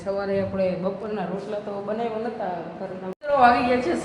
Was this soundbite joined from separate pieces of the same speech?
yes; 1 cut; at 3.1 s

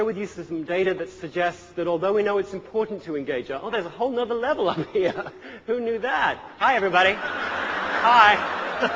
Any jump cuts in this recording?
no; 0 cuts

